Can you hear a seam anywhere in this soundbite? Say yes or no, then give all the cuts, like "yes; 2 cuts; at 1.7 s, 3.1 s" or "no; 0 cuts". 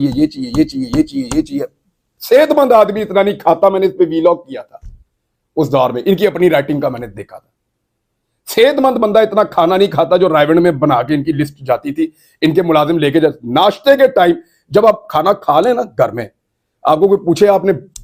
no; 0 cuts